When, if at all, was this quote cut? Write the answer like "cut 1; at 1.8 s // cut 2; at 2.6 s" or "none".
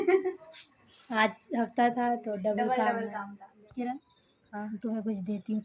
cut 1; at 3.4 s